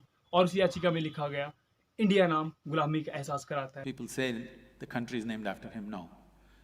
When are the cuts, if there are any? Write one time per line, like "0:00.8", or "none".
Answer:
0:03.8

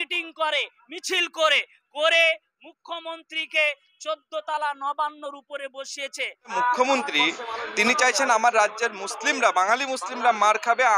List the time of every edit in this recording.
0:06.5

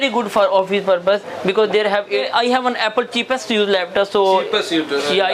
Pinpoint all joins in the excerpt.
0:02.1

